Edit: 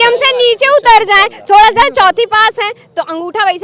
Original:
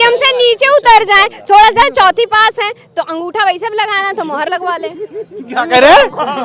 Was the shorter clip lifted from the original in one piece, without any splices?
yes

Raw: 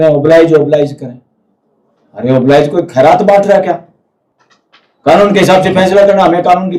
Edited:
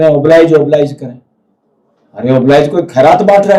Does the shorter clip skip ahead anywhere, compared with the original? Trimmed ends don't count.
no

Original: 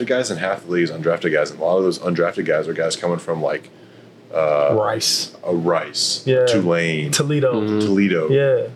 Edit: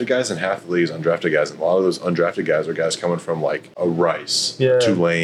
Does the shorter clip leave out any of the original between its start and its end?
yes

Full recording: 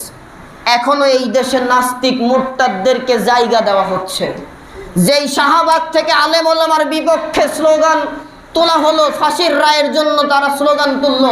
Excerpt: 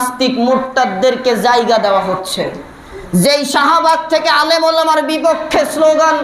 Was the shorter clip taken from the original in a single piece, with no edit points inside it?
yes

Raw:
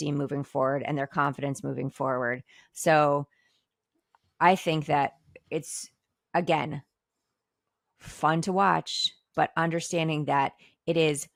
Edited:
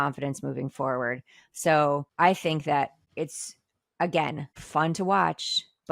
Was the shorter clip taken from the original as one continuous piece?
no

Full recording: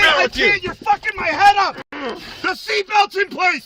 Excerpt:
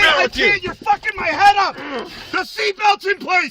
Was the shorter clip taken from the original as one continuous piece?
no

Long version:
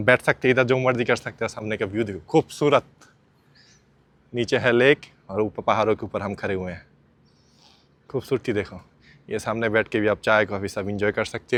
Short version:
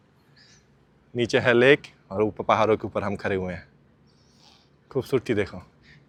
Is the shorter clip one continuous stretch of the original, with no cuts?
yes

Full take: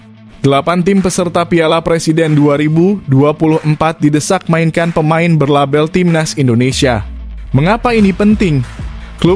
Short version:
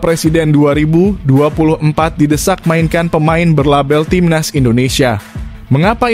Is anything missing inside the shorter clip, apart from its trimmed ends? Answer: no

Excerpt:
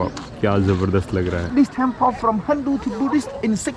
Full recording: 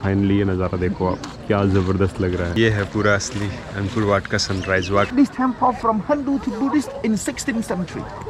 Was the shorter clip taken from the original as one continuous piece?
no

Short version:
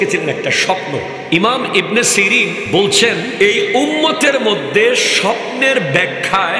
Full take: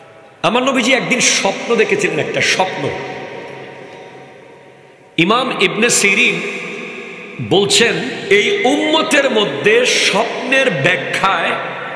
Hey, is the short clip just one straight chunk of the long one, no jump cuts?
no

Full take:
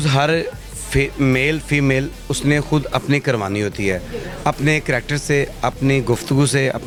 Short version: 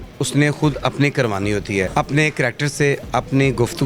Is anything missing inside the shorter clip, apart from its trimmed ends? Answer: yes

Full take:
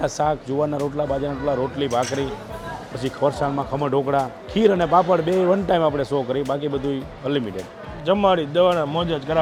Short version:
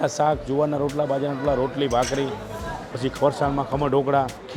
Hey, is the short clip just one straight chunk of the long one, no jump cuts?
yes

